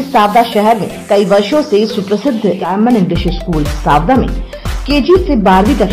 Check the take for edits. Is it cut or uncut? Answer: cut